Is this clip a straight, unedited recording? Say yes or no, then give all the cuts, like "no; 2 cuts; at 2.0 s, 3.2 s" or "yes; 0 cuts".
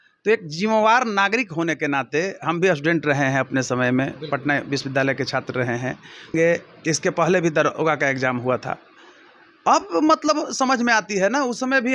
no; 1 cut; at 6.3 s